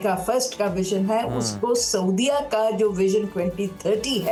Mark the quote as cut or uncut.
uncut